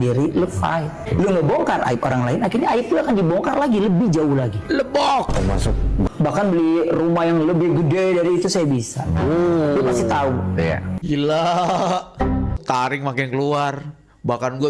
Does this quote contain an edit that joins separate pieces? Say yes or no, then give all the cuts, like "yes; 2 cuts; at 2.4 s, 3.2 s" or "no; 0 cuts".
yes; 4 cuts; at 1.0 s, 6.1 s, 10.9 s, 12.6 s